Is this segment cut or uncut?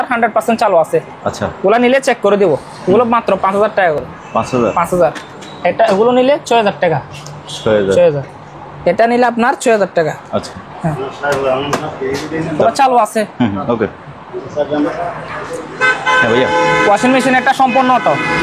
uncut